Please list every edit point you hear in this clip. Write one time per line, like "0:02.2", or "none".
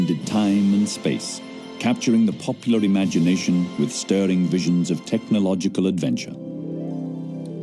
none